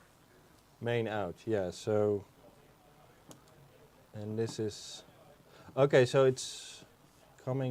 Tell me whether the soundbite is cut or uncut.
uncut